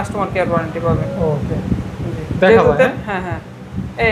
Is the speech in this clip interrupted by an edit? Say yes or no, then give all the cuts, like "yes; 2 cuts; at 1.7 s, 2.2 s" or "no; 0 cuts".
no; 0 cuts